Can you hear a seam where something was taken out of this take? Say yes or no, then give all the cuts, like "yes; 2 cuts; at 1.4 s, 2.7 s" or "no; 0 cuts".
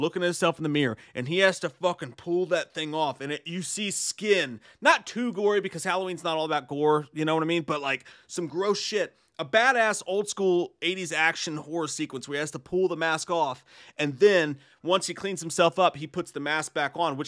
no; 0 cuts